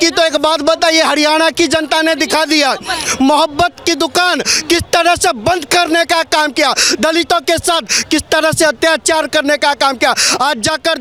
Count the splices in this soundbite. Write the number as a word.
zero